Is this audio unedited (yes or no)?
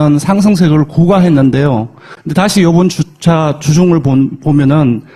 no